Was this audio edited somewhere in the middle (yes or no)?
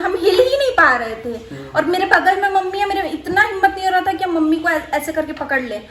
no